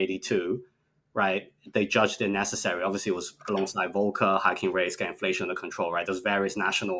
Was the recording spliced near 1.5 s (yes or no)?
no